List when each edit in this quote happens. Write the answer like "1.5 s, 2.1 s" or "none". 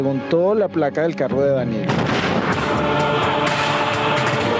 1.8 s

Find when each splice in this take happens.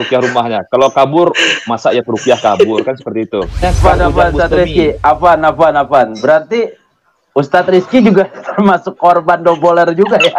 3.6 s

